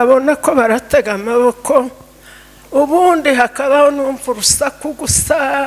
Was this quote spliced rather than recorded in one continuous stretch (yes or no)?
no